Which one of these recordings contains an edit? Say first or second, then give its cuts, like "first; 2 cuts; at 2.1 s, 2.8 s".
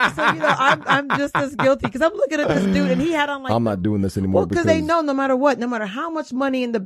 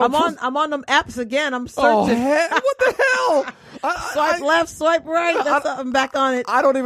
first; 1 cut; at 3.3 s